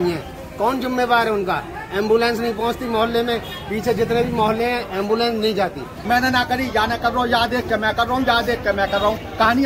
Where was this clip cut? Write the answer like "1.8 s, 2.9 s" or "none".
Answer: 5.9 s